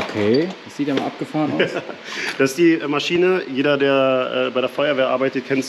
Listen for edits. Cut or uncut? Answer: uncut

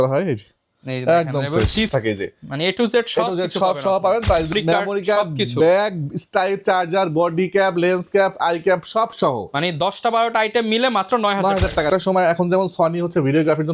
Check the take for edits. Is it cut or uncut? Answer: cut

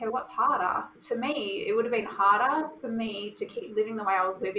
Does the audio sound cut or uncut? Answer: cut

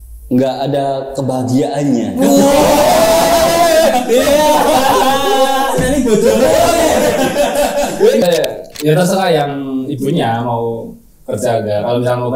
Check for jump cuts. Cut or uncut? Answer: cut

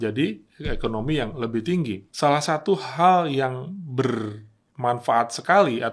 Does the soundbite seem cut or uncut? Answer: cut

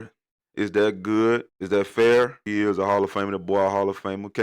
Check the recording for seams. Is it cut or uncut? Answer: cut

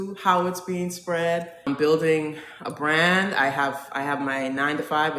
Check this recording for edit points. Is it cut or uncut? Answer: cut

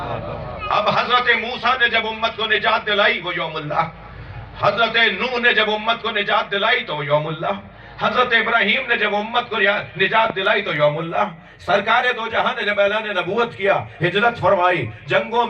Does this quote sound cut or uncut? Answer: uncut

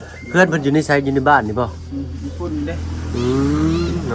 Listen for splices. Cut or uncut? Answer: uncut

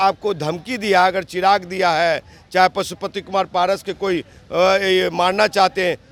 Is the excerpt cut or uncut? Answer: uncut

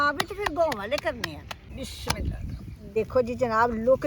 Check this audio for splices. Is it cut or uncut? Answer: cut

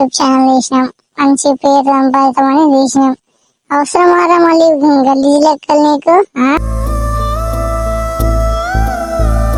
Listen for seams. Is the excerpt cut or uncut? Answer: uncut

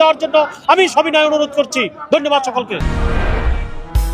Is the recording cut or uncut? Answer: uncut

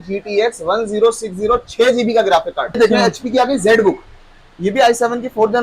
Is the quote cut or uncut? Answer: cut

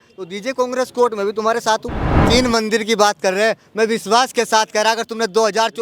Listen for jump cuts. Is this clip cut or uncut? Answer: cut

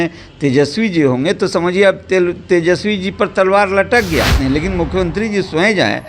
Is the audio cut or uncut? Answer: cut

